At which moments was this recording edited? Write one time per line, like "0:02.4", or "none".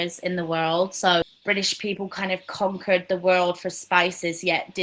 0:01.3